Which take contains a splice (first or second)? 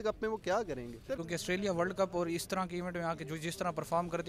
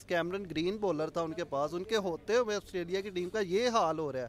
first